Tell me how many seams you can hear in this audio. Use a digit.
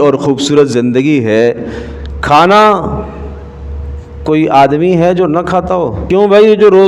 1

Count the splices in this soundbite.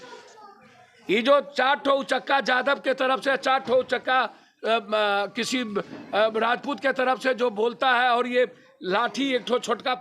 0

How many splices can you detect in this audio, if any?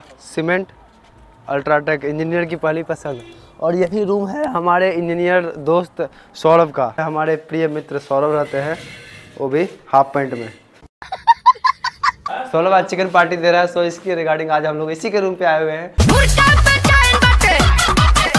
3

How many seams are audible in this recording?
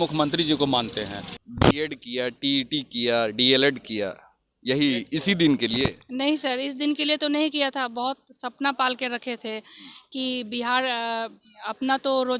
1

